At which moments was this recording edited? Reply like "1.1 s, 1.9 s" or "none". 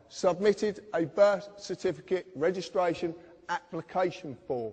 3.7 s